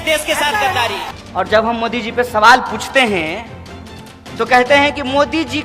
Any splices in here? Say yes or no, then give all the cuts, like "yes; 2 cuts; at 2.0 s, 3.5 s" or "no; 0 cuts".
yes; 1 cut; at 1.1 s